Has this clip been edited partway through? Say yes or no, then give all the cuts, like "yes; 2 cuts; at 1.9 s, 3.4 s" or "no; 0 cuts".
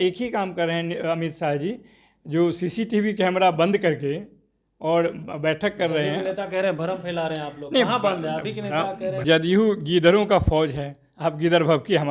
yes; 1 cut; at 9.2 s